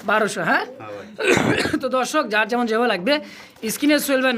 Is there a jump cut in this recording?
no; 0 cuts

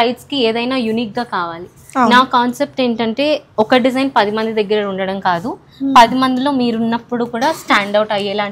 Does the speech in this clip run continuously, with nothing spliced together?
yes; 0 cuts

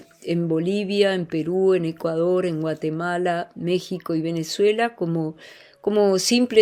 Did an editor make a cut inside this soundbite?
no; 0 cuts

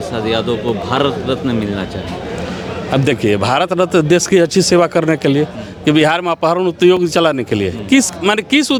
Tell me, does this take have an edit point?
no; 0 cuts

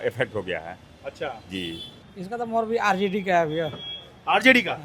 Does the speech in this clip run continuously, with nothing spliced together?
no; 1 cut; at 1.9 s

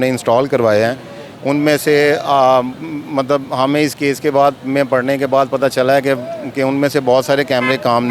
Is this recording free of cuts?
yes; 0 cuts

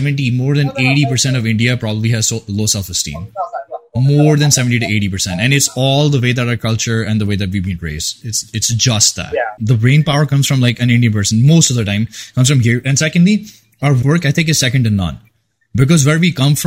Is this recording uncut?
no; 2 cuts; at 9.6 s, 14.0 s

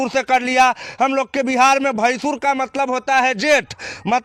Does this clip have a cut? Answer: no; 0 cuts

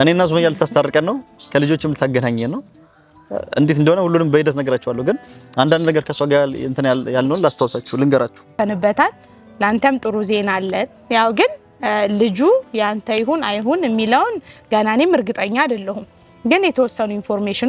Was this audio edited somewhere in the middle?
yes; 1 cut; at 8.5 s

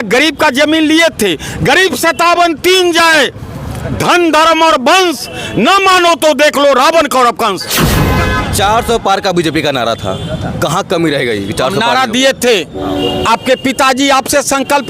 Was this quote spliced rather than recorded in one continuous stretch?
yes; 1 cut; at 8.0 s

